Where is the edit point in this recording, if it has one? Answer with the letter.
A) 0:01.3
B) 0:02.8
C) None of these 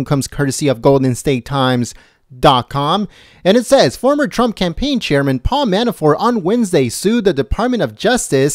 C